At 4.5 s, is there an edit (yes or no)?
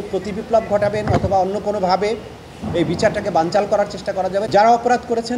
yes